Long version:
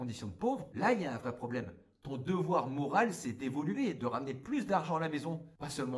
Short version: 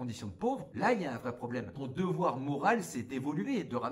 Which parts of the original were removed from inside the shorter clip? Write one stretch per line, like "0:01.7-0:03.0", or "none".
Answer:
0:01.8-0:02.1